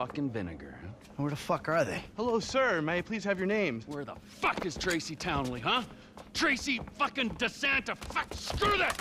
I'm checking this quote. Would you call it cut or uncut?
uncut